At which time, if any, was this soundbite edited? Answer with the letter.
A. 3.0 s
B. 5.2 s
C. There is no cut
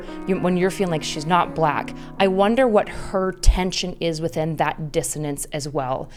C